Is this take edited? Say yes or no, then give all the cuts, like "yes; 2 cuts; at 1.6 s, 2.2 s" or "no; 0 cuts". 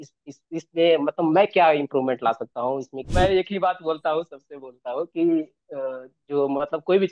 yes; 1 cut; at 3.0 s